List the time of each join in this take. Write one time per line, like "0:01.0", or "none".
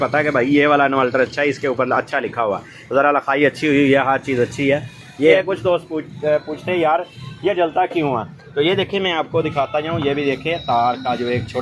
0:05.3